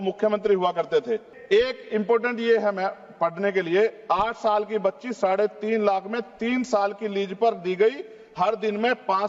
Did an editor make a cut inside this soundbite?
yes; 1 cut; at 1.3 s

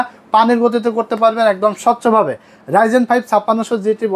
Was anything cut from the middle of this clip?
no; 0 cuts

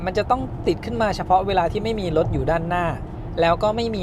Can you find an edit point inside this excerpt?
no; 0 cuts

